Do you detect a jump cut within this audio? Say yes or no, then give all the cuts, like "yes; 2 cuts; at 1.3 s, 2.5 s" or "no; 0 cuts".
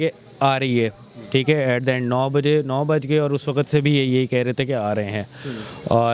no; 0 cuts